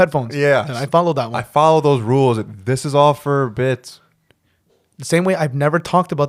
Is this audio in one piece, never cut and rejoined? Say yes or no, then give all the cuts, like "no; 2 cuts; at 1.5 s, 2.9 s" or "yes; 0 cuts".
yes; 0 cuts